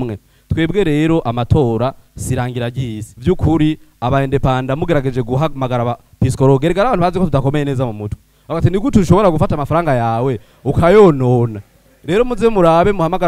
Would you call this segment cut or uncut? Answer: cut